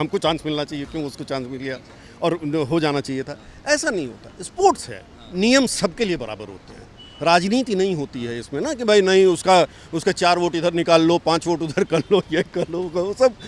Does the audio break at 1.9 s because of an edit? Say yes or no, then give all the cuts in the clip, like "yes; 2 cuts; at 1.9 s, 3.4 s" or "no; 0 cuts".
no; 0 cuts